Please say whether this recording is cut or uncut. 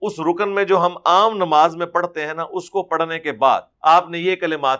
cut